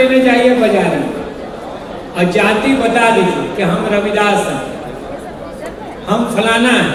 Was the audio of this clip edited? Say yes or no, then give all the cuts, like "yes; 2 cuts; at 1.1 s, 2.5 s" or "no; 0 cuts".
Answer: no; 0 cuts